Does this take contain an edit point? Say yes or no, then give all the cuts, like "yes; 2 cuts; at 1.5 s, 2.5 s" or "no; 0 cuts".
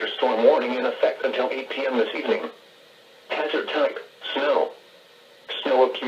yes; 1 cut; at 1.2 s